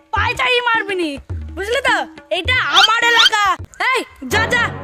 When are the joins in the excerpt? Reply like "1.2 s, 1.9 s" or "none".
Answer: 3.7 s